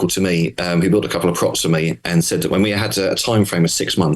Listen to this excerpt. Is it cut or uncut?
uncut